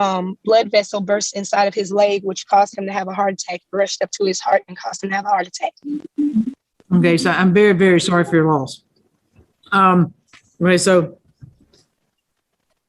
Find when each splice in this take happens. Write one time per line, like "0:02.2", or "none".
none